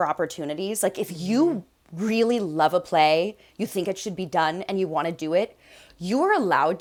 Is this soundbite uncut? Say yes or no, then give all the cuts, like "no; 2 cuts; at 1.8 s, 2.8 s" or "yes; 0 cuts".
yes; 0 cuts